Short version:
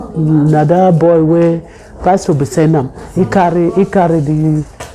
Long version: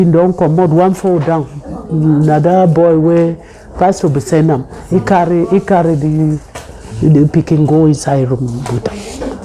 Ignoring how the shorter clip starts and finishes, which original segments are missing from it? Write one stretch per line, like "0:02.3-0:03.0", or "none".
none